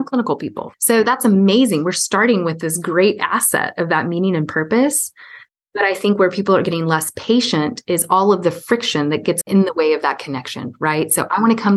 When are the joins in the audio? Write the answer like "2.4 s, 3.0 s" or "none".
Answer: 9.4 s